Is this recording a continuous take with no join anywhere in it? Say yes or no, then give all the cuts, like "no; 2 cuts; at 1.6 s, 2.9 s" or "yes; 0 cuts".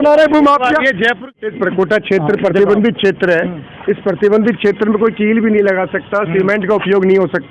no; 1 cut; at 1.3 s